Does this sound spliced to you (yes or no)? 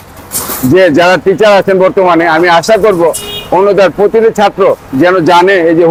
no